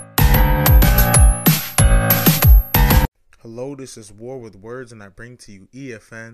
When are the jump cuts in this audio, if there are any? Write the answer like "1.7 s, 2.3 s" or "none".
none

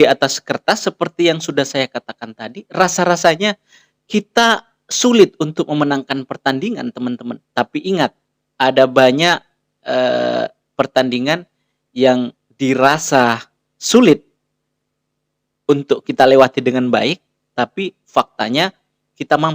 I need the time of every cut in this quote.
none

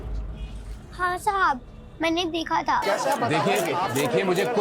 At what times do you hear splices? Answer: 2.8 s

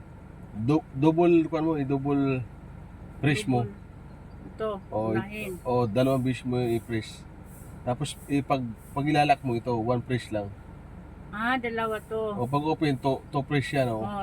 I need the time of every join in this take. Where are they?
none

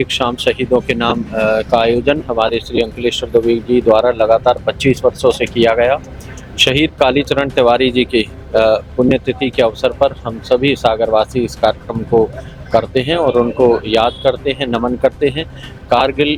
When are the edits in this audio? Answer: none

